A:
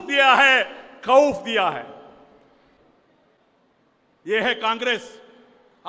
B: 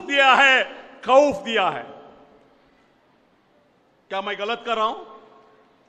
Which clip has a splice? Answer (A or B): A